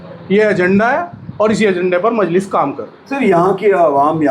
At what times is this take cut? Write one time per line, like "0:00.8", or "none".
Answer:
none